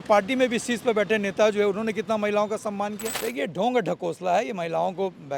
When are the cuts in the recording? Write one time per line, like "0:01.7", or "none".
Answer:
0:03.1